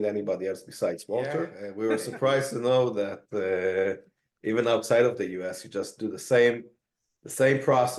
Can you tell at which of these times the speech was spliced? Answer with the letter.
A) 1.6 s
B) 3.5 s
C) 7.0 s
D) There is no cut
A